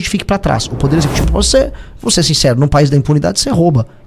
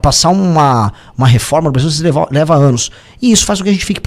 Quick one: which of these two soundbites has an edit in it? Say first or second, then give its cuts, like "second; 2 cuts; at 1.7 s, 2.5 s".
first; 1 cut; at 1.3 s